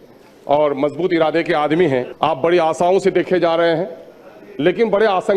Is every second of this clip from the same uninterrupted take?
no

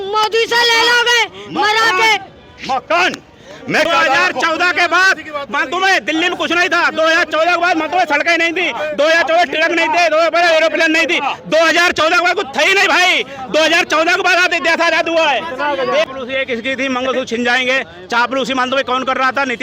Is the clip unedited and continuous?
no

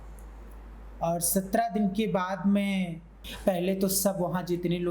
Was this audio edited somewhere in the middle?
yes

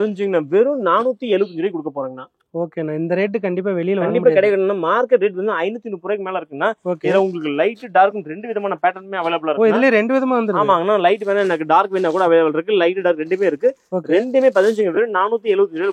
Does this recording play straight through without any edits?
yes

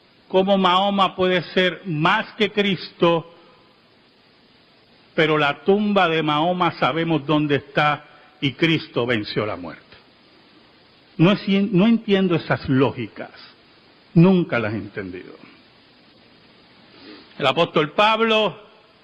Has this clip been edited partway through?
no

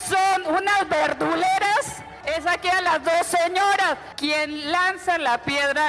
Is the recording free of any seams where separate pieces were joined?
no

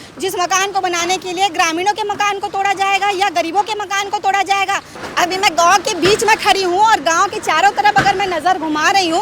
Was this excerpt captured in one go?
no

